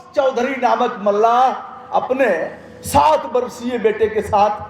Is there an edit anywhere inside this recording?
no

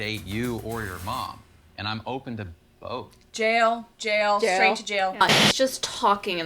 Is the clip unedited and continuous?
no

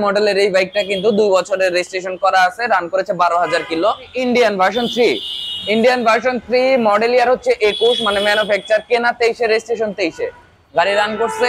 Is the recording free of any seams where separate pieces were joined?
no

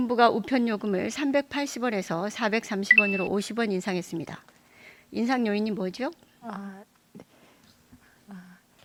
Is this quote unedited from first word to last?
yes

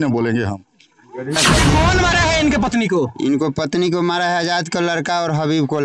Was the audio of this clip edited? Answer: yes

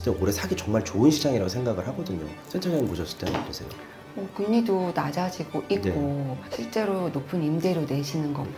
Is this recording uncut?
yes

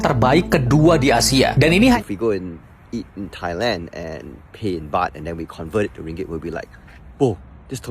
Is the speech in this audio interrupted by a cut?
yes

